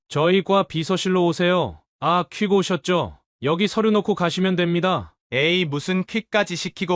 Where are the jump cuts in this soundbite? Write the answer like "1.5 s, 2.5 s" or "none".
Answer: 1.8 s, 3.2 s, 5.1 s